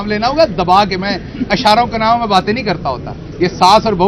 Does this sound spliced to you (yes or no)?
no